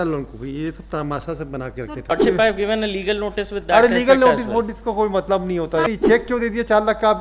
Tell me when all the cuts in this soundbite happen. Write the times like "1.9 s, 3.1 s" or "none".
2.1 s, 5.9 s